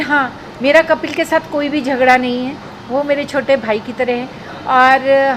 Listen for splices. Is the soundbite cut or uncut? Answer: uncut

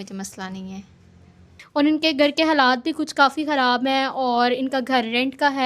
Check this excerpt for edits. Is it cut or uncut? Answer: uncut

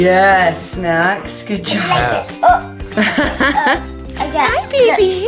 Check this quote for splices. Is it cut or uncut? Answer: cut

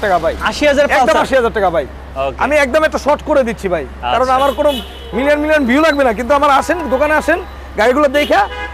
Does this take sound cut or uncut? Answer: uncut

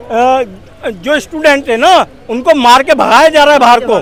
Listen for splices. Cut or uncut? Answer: uncut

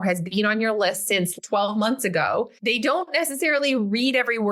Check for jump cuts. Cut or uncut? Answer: cut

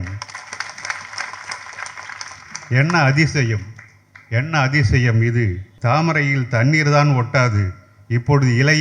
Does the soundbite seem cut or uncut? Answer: cut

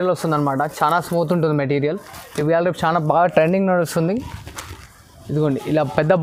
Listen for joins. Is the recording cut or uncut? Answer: uncut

